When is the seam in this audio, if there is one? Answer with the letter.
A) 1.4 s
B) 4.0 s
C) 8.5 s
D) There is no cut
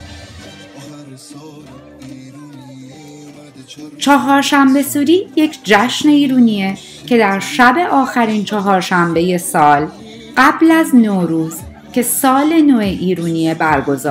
B